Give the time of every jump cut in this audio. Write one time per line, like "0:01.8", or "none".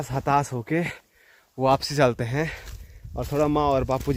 none